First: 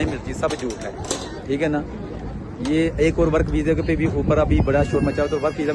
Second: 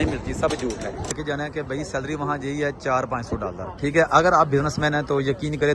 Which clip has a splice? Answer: second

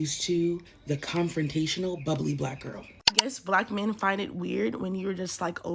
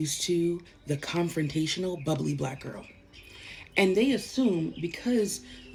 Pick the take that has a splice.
first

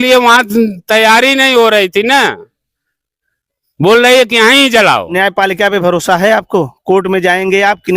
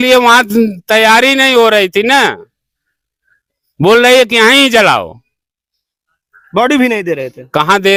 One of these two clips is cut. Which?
first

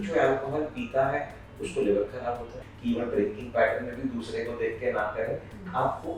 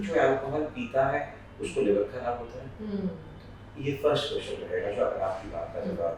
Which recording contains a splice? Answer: first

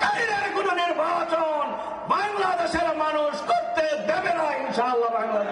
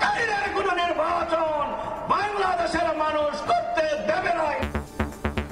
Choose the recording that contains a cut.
second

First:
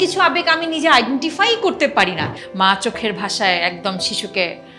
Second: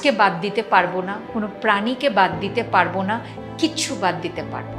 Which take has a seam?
first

